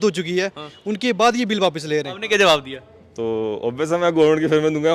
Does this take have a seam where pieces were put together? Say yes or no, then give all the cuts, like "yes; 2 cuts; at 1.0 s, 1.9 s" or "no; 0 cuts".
yes; 1 cut; at 2.1 s